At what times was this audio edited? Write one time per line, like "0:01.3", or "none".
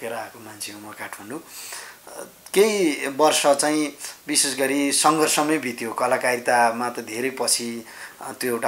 none